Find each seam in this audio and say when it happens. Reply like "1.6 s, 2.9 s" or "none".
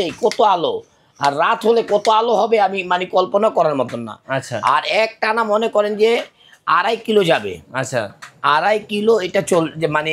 none